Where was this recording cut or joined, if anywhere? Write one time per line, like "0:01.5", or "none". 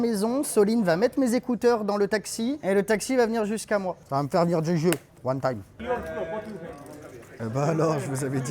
0:04.0
0:05.7
0:07.2